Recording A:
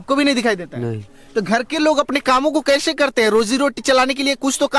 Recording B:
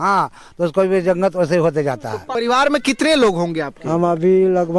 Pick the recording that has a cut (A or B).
B